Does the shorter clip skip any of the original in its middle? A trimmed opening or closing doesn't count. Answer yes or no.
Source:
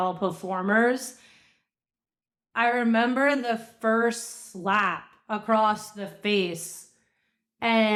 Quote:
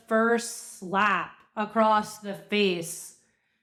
no